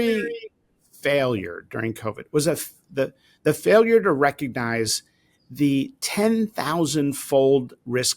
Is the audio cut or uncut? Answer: uncut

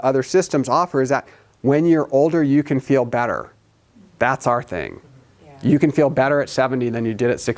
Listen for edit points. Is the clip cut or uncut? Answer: uncut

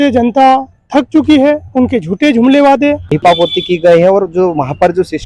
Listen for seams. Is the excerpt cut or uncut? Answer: cut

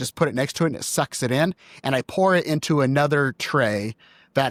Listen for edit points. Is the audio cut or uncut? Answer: uncut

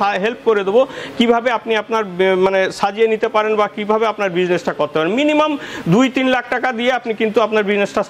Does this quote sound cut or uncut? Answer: uncut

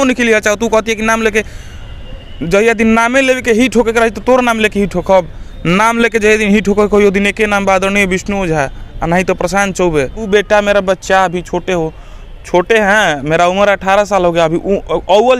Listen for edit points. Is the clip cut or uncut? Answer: cut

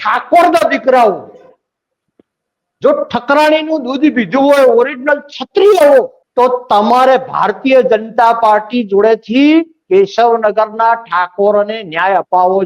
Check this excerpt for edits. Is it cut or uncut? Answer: cut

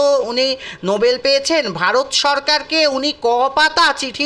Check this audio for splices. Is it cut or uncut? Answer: uncut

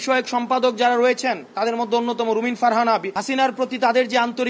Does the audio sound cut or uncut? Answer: cut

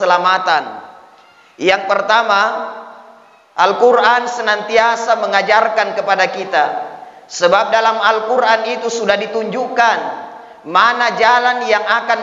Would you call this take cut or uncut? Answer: uncut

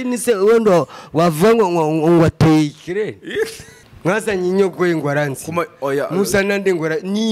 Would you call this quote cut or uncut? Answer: cut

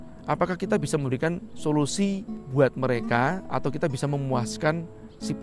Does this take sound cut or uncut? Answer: cut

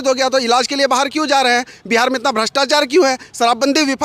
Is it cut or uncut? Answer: uncut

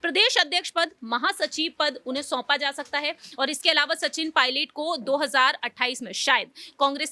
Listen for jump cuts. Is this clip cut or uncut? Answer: uncut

